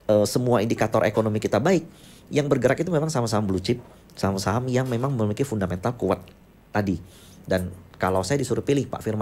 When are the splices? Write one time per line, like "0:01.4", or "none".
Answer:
none